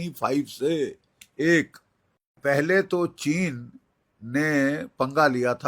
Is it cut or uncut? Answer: cut